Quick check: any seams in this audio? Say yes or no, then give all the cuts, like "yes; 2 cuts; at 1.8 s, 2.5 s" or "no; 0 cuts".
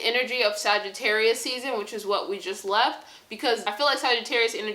yes; 1 cut; at 3.6 s